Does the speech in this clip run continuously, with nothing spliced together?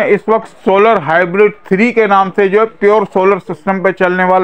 yes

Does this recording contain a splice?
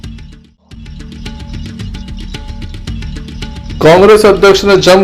yes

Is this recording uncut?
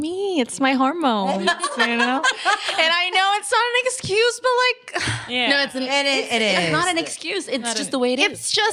yes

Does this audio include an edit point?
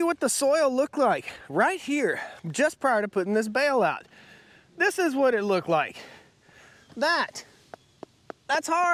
no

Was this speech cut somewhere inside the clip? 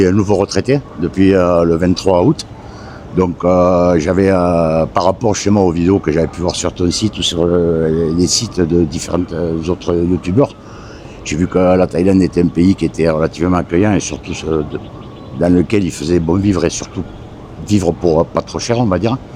no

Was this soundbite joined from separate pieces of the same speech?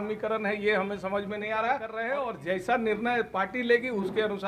yes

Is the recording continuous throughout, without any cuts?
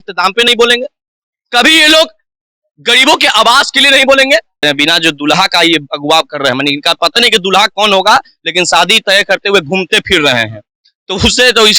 no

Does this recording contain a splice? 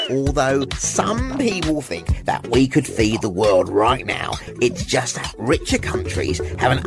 no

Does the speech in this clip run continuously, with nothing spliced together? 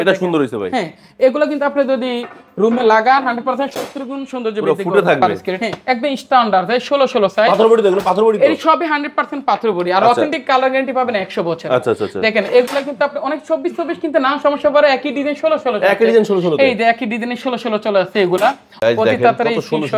no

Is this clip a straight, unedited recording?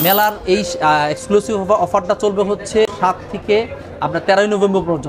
yes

